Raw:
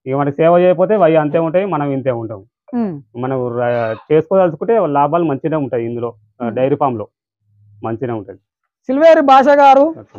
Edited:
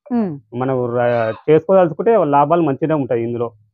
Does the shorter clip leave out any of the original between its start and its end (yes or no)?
no